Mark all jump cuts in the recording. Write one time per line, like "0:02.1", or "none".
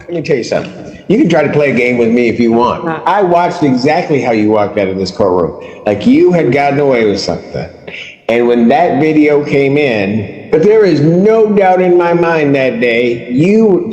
0:10.3